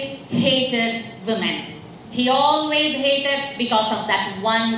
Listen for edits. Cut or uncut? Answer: uncut